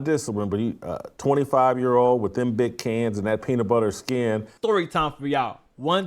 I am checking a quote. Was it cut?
yes; 1 cut; at 4.5 s

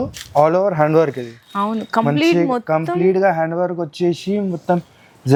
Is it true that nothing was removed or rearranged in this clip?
yes; 0 cuts

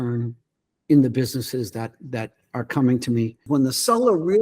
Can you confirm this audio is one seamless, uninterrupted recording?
no; 1 cut; at 3.5 s

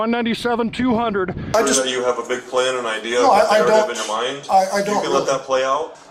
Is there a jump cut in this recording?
yes; 1 cut; at 1.5 s

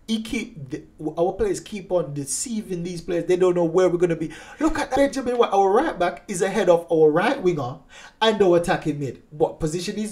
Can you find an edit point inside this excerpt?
yes; 1 cut; at 4.9 s

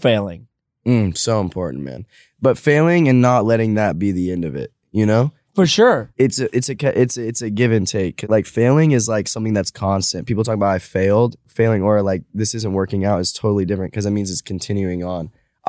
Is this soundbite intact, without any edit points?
no; 3 cuts; at 6.1 s, 8.2 s, 11.4 s

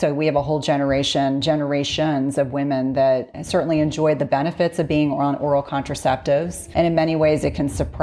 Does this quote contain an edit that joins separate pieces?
yes; 2 cuts; at 3.4 s, 6.6 s

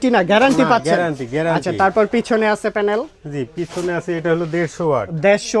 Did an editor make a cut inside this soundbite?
no; 0 cuts

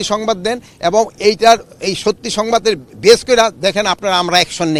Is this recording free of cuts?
yes; 0 cuts

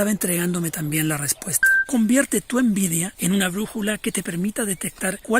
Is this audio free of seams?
no; 1 cut; at 1.8 s

